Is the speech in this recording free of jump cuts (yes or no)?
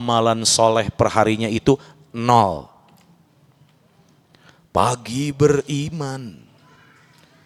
yes